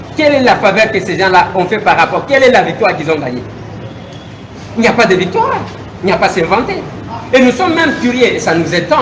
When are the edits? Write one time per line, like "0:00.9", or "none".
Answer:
none